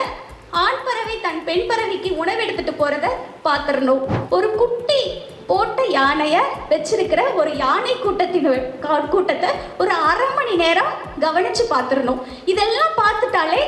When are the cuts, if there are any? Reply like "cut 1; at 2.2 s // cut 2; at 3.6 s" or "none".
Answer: cut 1; at 4.2 s